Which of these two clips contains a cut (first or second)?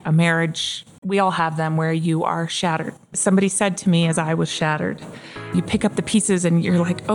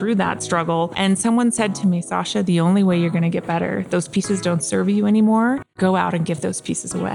second